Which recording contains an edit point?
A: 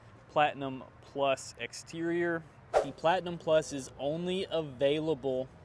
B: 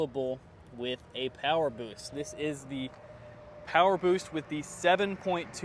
A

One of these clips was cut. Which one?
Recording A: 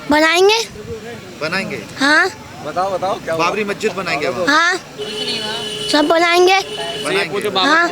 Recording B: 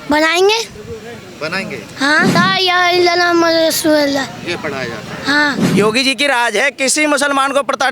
B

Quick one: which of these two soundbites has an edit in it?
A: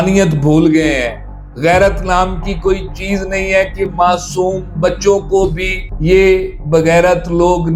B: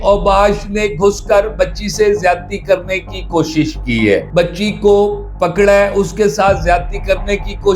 B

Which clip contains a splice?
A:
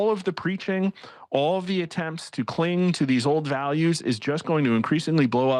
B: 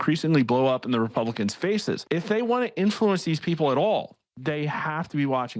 B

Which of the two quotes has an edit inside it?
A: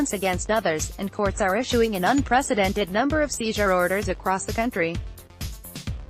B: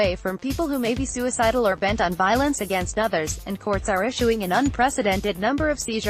A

